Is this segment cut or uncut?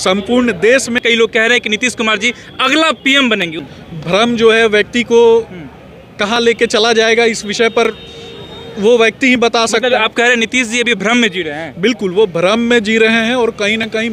cut